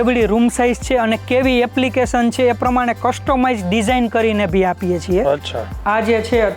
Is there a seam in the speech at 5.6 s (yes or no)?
yes